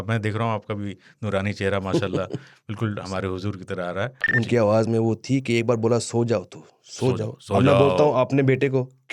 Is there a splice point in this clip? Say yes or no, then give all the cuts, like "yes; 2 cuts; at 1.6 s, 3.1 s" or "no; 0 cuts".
yes; 1 cut; at 4.3 s